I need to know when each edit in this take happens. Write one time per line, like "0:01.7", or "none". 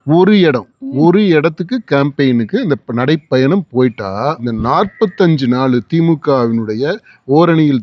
0:04.4